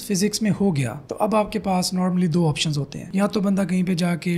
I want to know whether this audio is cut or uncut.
uncut